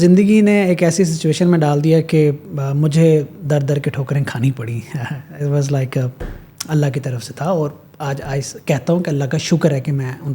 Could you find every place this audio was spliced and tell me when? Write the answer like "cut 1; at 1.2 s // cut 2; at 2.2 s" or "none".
none